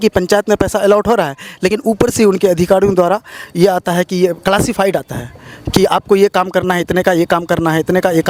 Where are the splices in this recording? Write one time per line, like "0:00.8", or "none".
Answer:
none